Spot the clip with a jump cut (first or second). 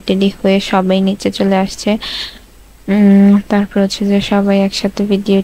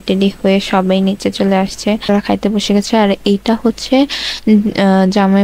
second